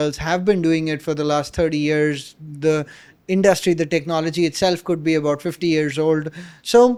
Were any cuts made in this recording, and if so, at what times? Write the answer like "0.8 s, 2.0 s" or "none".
none